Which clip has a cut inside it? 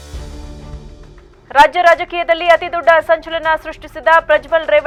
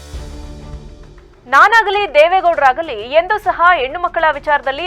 second; 1 cut; at 1.0 s

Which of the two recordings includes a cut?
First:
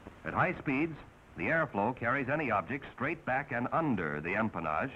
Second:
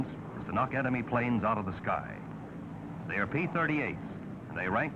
first; 1 cut; at 3.8 s

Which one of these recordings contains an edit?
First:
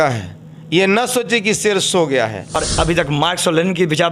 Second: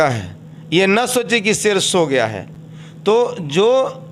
first; 1 cut; at 2.6 s

